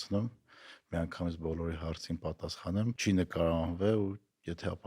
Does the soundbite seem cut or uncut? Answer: cut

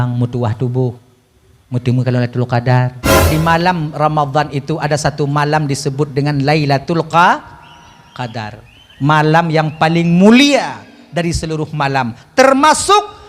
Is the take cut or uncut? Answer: cut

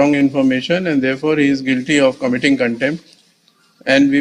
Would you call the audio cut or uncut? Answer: uncut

